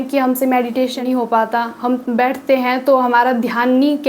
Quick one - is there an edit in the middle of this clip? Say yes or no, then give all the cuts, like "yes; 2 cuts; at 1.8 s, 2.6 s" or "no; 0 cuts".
yes; 1 cut; at 1.0 s